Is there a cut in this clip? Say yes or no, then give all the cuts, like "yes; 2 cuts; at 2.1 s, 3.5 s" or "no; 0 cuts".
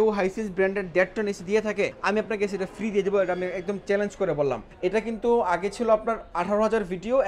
yes; 1 cut; at 4.7 s